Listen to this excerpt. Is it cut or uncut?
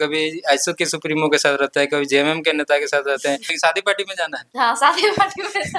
cut